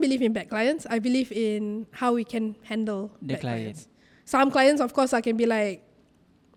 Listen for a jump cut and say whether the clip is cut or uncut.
uncut